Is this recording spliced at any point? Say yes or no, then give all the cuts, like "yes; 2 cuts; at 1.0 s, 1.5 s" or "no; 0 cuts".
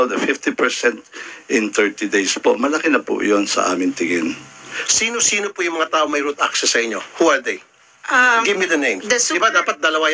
yes; 2 cuts; at 4.7 s, 9.0 s